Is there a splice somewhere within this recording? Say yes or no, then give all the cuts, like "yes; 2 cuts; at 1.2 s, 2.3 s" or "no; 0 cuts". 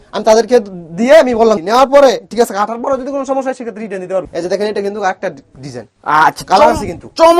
yes; 2 cuts; at 1.6 s, 4.3 s